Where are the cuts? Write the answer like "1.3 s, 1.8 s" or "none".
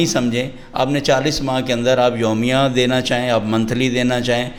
none